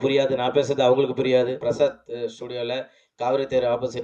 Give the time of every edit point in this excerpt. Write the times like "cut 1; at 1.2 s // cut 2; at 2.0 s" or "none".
cut 1; at 1.6 s